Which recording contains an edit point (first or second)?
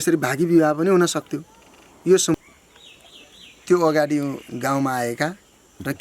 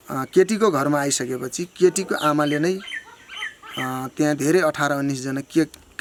first